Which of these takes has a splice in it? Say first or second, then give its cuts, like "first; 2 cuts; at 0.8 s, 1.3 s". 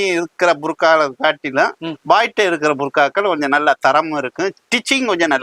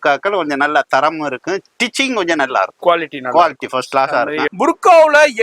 second; 1 cut; at 4.5 s